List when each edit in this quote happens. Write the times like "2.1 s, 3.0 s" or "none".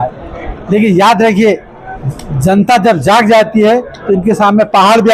none